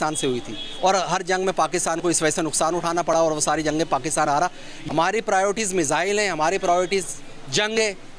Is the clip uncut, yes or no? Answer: no